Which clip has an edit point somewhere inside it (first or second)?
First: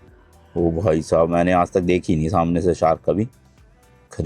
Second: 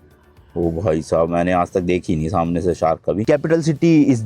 second